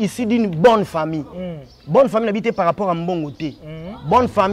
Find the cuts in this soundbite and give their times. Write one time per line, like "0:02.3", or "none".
none